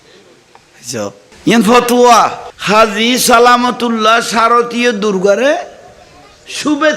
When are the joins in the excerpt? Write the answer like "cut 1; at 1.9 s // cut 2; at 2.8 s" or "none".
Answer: cut 1; at 1.3 s